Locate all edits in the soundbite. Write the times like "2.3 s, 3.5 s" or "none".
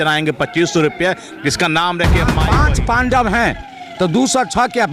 2.4 s